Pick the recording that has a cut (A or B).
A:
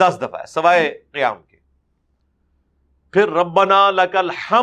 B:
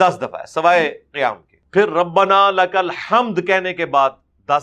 B